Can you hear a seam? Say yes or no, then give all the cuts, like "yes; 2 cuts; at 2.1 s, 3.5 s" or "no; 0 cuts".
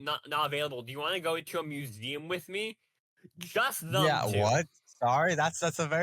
no; 0 cuts